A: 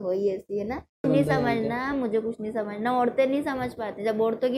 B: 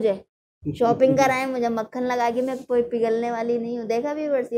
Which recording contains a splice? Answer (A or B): A